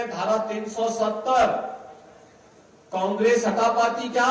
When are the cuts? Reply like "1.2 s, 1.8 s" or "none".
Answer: none